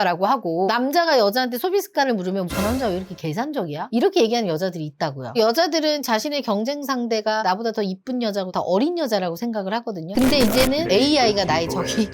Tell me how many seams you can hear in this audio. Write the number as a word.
two